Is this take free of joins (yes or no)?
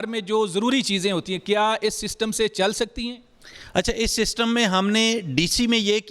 yes